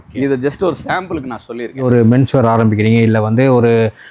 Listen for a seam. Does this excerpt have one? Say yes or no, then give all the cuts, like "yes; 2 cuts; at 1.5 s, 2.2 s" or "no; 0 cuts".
yes; 1 cut; at 1.8 s